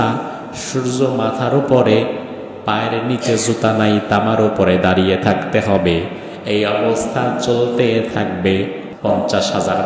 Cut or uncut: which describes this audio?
cut